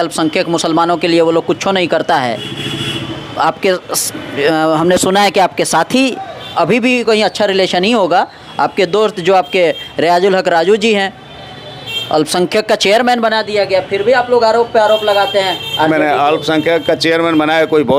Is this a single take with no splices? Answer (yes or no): yes